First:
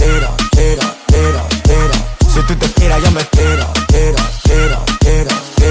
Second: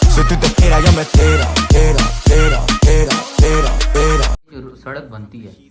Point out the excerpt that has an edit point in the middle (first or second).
second